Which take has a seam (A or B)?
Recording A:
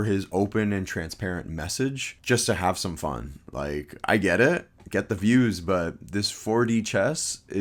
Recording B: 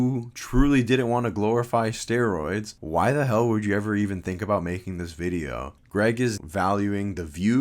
B